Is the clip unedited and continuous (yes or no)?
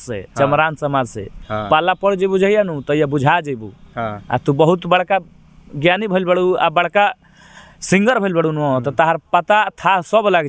yes